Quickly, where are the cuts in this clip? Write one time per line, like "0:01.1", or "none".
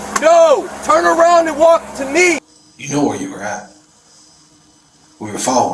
0:02.5